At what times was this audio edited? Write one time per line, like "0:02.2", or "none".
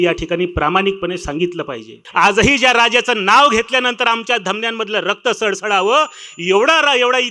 0:02.0